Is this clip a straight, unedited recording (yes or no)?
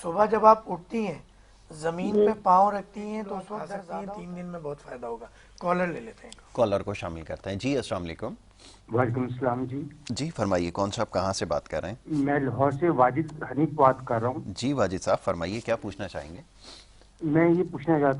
no